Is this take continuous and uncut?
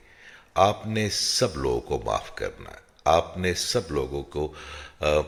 yes; 0 cuts

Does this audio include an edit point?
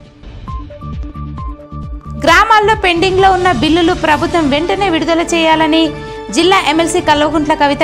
yes; 1 cut; at 0.9 s

